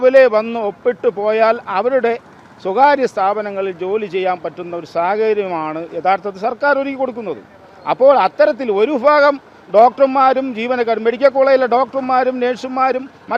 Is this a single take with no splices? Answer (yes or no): yes